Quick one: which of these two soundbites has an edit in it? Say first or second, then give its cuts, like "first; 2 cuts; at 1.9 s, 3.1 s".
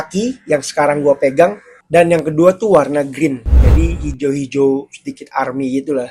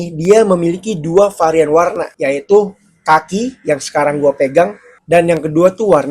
second; 1 cut; at 2.1 s